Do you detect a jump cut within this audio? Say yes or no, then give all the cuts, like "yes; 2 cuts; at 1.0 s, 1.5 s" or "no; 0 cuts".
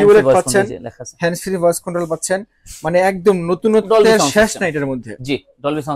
no; 0 cuts